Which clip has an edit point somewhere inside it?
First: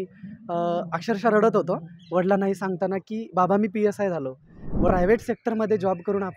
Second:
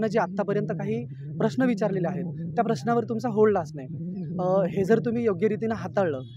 first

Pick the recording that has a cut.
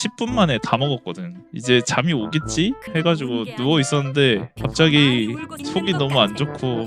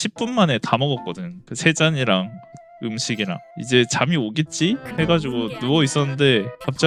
first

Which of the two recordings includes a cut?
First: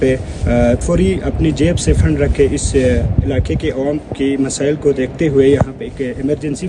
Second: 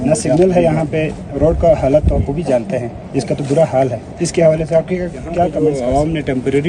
second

